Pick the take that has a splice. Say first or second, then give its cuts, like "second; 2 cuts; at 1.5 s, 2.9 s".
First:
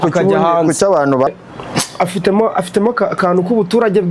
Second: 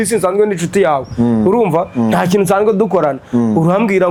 first; 1 cut; at 1.3 s